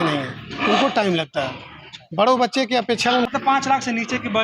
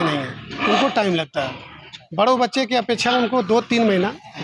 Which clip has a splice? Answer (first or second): first